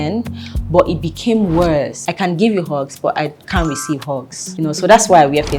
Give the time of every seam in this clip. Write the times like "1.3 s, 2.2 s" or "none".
2.0 s, 4.4 s